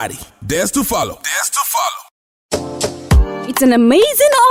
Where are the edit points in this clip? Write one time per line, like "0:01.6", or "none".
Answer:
none

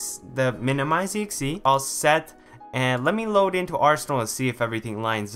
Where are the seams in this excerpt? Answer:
0:01.2

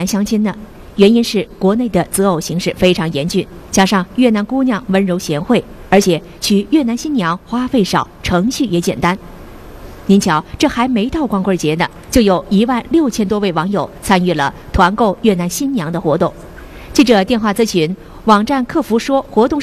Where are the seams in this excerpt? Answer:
0:07.1

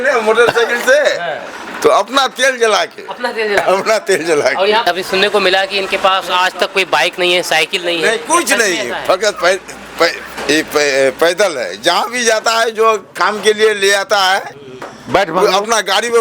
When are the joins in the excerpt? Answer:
0:04.8

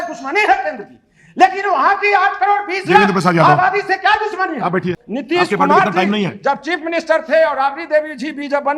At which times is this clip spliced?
0:04.9

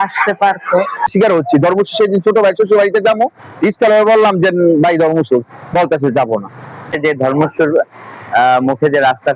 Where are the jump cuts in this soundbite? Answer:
0:01.1
0:06.9

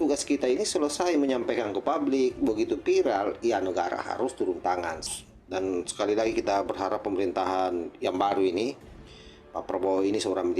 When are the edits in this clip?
0:05.0

